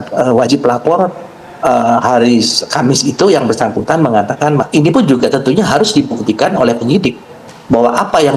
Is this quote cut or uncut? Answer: cut